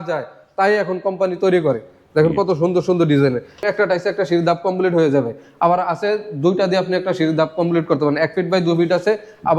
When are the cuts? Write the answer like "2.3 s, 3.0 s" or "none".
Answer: 3.6 s